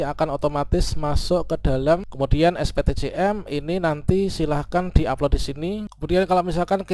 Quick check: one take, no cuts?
no; 2 cuts; at 2.1 s, 5.9 s

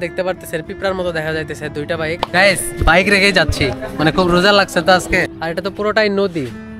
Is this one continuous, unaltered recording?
no; 2 cuts; at 2.2 s, 5.4 s

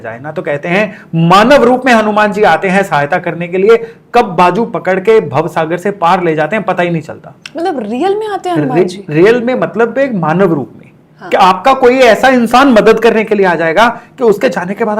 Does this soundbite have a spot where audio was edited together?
no; 0 cuts

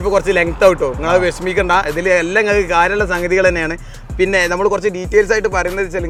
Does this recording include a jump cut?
no; 0 cuts

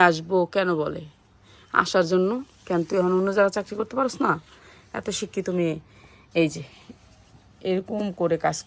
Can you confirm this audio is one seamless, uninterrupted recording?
yes; 0 cuts

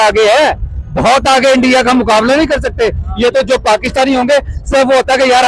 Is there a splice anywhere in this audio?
no; 0 cuts

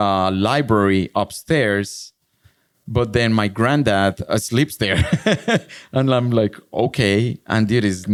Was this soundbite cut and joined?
no; 0 cuts

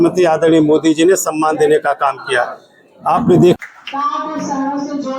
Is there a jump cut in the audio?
yes; 1 cut; at 3.6 s

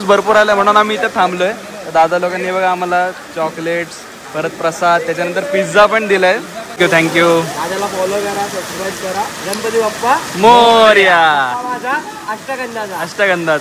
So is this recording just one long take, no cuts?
no; 1 cut; at 6.8 s

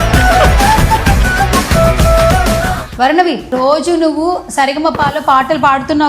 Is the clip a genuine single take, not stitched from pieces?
yes; 0 cuts

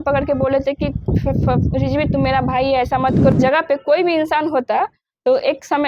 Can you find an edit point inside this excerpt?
yes; 1 cut; at 3.3 s

